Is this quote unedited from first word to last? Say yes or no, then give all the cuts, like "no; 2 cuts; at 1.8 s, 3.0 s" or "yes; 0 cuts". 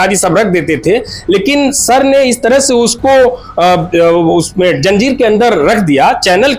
yes; 0 cuts